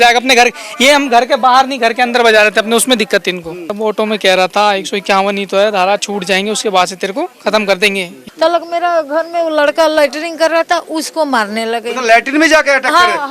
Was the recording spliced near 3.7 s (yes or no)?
yes